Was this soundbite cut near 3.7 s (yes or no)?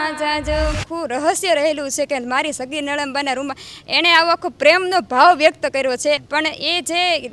no